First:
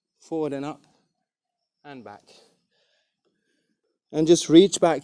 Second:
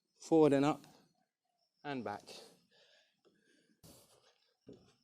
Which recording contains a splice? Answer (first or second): first